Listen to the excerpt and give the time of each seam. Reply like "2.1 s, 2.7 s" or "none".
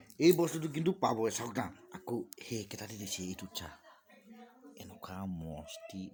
none